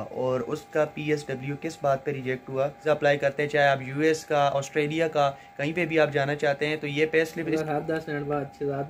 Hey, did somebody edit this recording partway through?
yes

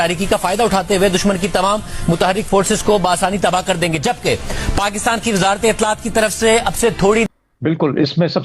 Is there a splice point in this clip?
yes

